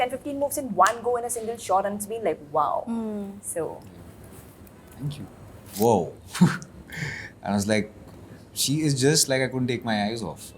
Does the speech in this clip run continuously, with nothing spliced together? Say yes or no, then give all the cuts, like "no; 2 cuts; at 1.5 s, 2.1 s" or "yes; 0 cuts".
no; 1 cut; at 5.7 s